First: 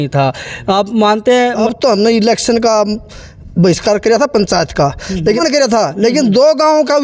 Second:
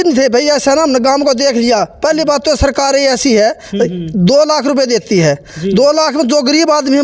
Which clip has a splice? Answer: first; 2 cuts; at 1.6 s, 5.4 s

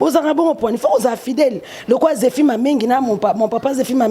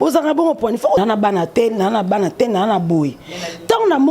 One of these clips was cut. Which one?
second; 1 cut; at 1.0 s

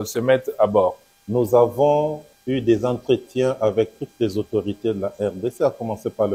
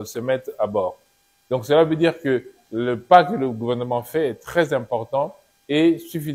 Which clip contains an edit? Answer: first; 2 cuts; at 1.1 s, 2.3 s

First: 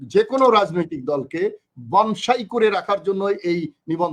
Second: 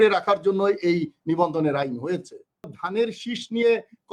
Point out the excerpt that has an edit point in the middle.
second; 1 cut; at 2.8 s

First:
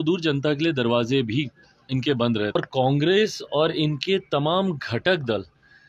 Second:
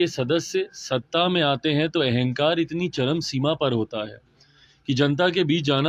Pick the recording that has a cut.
first; 1 cut; at 2.6 s

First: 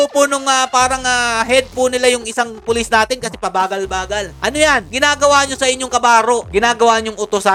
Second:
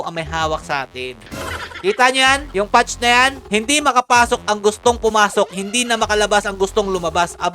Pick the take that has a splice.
second; 3 cuts; at 1.2 s, 2.5 s, 3.4 s

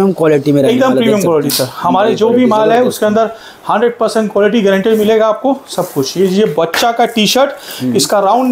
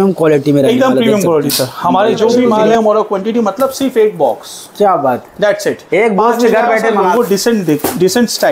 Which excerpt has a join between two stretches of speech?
second; 2 cuts; at 2.7 s, 7.1 s

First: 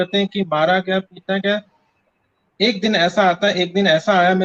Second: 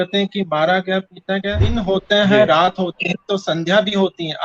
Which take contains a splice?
second; 1 cut; at 1.8 s

